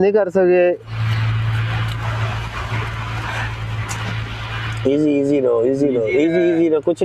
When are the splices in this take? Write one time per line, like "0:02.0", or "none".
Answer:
none